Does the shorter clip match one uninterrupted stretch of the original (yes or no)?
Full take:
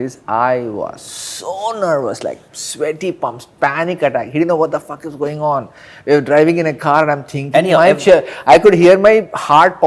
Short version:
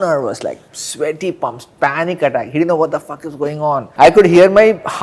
no